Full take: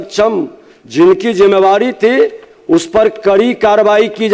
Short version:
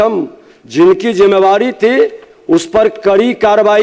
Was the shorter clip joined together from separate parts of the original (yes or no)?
no